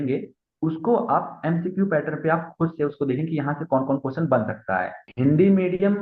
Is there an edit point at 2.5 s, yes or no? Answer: no